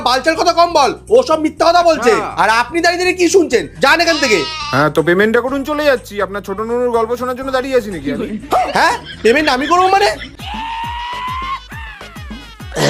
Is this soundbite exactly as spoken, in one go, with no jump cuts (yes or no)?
no